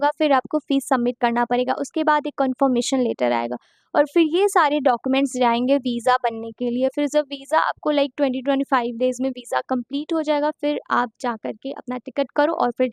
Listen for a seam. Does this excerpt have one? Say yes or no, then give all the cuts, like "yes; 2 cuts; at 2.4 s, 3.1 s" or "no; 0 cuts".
no; 0 cuts